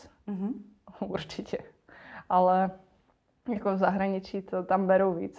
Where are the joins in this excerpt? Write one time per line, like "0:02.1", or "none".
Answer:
none